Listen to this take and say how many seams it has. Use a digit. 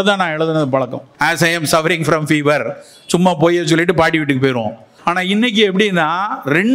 2